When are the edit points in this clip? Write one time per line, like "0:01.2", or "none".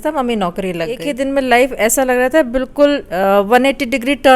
0:01.1